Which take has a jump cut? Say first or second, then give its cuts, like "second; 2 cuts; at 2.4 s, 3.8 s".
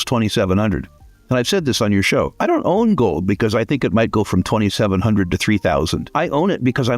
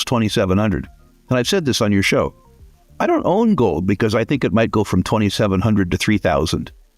first; 2 cuts; at 2.3 s, 6.0 s